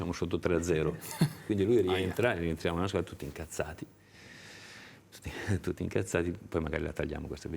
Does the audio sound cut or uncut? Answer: uncut